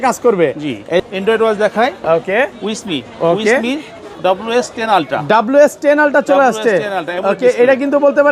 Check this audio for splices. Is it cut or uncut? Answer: cut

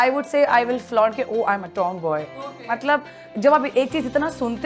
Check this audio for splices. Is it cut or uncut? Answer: uncut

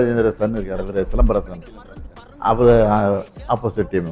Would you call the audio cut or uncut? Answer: uncut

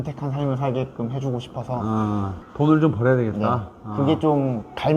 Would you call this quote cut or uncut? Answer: cut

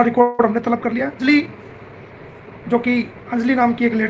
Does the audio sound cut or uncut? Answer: cut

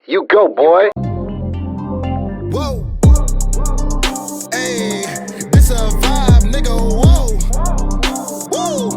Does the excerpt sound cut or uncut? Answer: cut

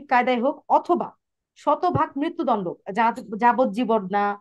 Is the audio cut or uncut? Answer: uncut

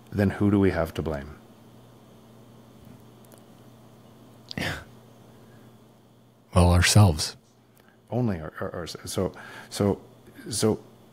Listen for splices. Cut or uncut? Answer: uncut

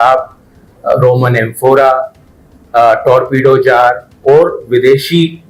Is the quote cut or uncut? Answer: uncut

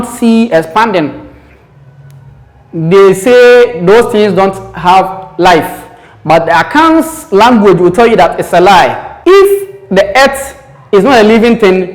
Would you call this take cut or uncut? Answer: cut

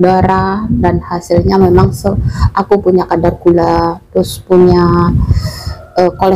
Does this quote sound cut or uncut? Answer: uncut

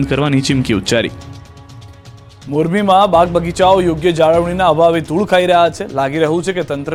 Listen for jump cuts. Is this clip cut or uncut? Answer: uncut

